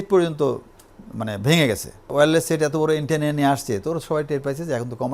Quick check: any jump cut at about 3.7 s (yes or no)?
no